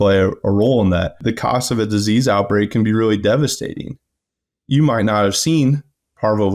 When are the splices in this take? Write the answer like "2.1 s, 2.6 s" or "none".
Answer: 1.2 s

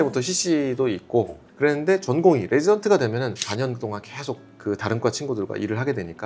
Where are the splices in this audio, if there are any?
1.4 s, 3.4 s

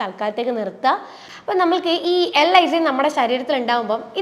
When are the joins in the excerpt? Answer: 1.2 s

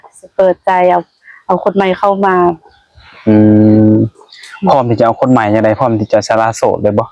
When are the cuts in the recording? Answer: none

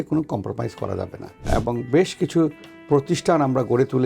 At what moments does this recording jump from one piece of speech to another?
1.4 s

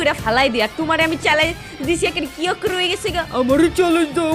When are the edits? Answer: none

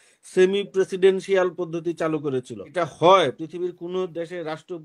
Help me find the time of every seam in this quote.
2.7 s

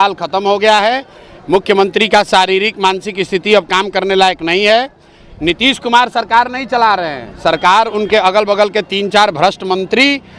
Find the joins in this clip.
none

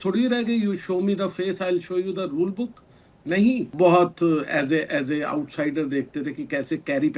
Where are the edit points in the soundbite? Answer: 3.7 s

